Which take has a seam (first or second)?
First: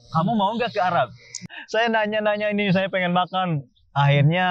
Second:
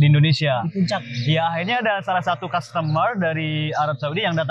first